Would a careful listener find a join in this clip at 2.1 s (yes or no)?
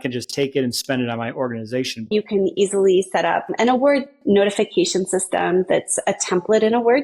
yes